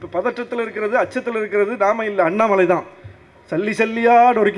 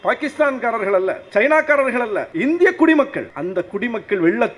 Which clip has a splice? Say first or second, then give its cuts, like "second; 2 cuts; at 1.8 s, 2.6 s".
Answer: second; 3 cuts; at 1.2 s, 2.3 s, 3.3 s